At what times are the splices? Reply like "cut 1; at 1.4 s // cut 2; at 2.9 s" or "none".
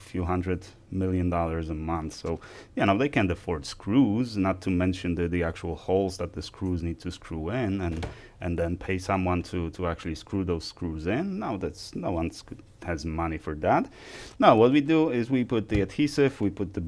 none